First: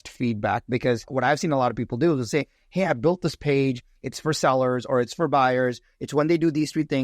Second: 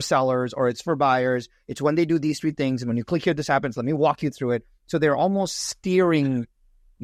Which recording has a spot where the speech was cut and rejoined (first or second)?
first